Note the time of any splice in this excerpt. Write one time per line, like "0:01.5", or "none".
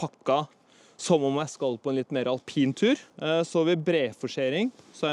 none